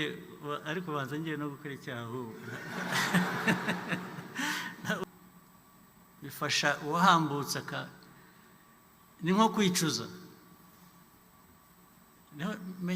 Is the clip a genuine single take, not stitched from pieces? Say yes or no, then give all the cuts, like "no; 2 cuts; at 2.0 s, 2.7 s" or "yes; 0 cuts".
no; 1 cut; at 5.0 s